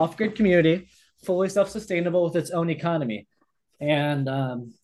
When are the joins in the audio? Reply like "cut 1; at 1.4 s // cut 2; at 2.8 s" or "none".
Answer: none